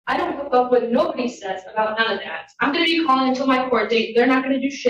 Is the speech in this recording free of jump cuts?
yes; 0 cuts

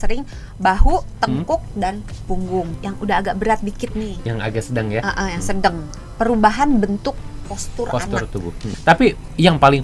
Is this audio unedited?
no; 2 cuts; at 2.7 s, 8.7 s

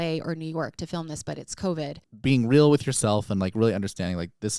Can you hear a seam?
yes; 1 cut; at 2.1 s

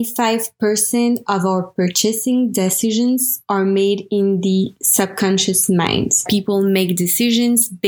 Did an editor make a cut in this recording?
yes; 1 cut; at 6.2 s

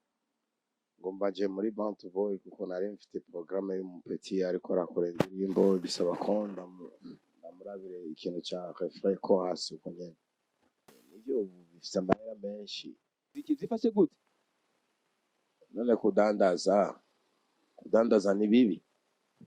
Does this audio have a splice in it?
yes; 2 cuts; at 11.0 s, 13.4 s

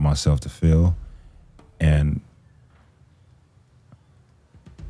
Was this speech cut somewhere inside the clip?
no; 0 cuts

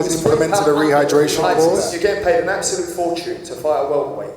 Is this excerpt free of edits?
no; 1 cut; at 1.8 s

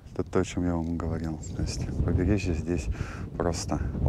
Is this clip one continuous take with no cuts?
yes; 0 cuts

